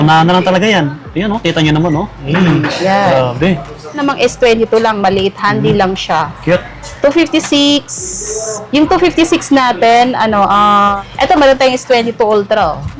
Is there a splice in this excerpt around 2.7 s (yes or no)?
no